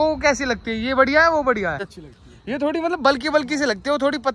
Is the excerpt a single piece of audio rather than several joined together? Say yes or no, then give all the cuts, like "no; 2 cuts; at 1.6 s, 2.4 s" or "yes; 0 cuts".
yes; 0 cuts